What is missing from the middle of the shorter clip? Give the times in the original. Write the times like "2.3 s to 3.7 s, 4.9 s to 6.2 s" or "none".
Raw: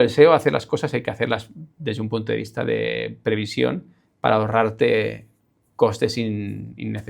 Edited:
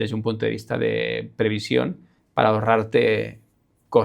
none